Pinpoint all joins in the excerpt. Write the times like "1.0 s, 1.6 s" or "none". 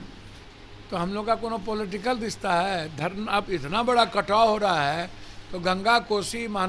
none